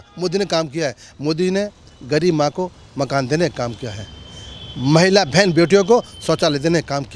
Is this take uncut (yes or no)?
yes